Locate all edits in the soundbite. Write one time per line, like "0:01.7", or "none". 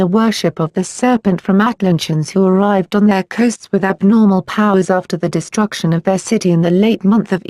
0:02.5